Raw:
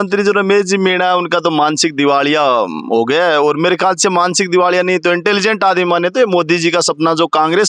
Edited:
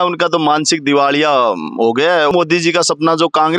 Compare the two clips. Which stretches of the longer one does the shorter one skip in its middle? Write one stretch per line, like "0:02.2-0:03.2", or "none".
0:03.4-0:06.3